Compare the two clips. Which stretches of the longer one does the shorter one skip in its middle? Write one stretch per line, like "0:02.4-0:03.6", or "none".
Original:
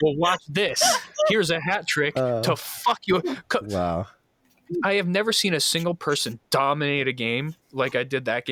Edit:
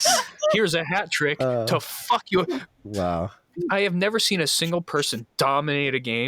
0:04.2-0:04.5